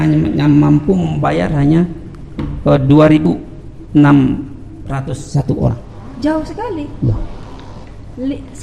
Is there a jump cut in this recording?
no; 0 cuts

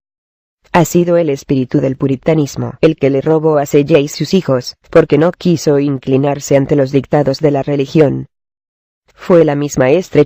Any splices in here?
no; 0 cuts

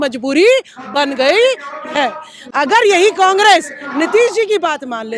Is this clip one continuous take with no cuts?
yes; 0 cuts

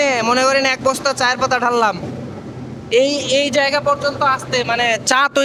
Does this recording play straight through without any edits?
yes; 0 cuts

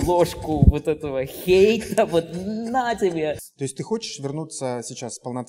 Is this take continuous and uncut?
no; 1 cut; at 3.4 s

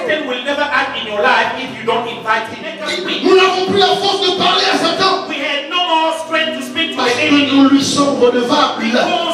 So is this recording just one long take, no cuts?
no; 1 cut; at 2.7 s

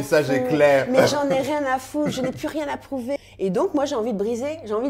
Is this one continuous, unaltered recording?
no; 1 cut; at 3.2 s

